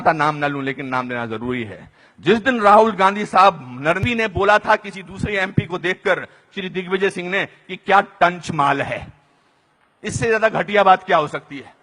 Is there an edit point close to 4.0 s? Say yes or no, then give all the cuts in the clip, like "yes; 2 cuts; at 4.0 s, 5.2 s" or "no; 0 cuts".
yes; 1 cut; at 4.0 s